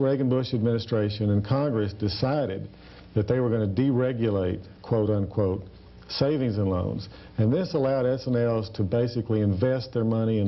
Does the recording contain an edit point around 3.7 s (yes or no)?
no